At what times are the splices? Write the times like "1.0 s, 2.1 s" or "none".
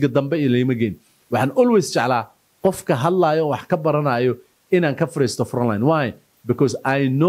none